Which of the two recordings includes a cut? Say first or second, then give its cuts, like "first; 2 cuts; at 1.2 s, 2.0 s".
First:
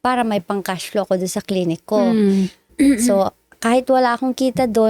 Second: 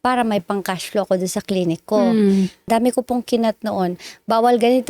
second; 1 cut; at 2.7 s